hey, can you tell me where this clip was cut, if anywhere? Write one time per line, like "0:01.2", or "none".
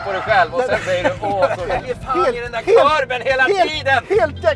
0:01.7

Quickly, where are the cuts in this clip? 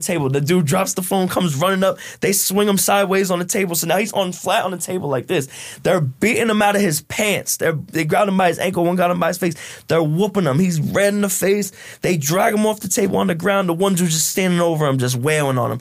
none

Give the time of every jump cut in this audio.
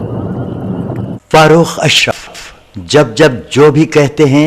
0:01.1

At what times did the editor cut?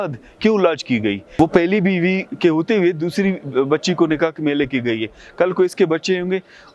0:01.4

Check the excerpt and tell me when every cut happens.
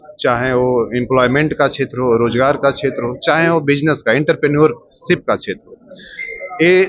none

